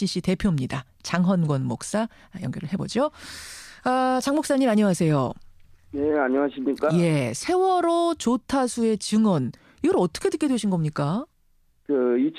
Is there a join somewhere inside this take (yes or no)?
yes